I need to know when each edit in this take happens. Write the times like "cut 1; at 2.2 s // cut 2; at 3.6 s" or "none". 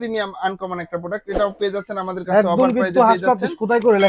cut 1; at 2.2 s